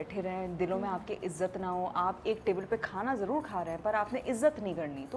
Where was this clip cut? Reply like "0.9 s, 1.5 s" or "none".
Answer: none